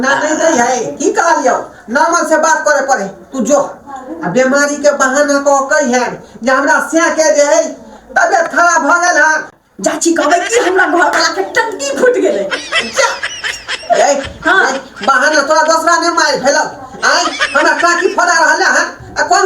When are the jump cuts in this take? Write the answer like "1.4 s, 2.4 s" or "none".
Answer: 9.5 s